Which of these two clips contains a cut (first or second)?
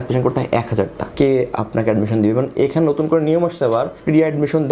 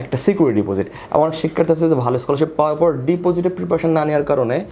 first